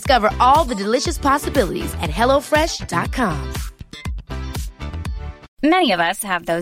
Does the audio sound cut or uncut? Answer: cut